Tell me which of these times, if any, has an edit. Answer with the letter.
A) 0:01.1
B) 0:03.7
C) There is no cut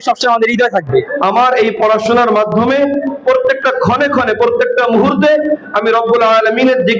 A